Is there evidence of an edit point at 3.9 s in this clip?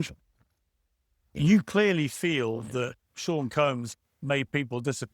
yes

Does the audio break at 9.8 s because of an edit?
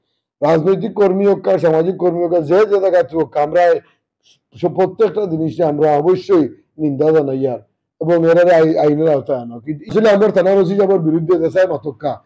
yes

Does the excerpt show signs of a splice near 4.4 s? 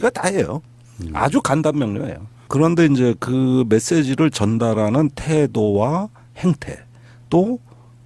yes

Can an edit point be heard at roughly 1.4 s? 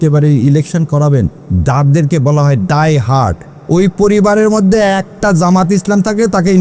yes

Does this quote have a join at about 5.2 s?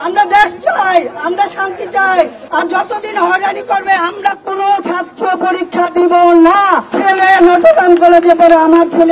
no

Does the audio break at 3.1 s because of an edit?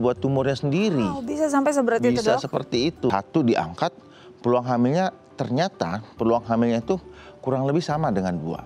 yes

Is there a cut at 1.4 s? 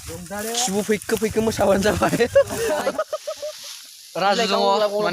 no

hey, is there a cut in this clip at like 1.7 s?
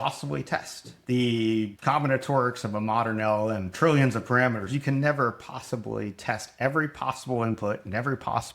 yes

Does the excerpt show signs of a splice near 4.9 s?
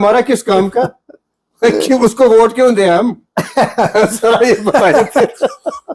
no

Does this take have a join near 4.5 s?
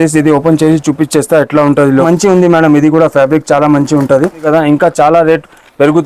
yes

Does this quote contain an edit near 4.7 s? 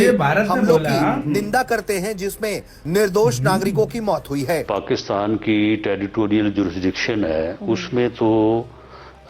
yes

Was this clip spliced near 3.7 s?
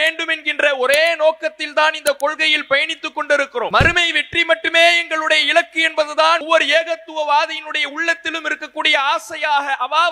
yes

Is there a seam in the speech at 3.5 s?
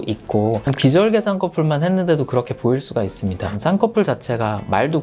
yes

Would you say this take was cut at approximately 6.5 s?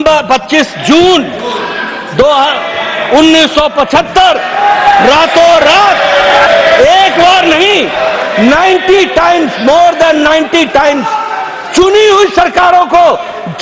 yes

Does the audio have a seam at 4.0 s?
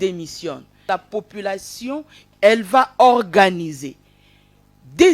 no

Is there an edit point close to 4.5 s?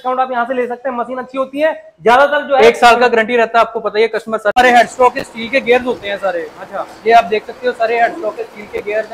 yes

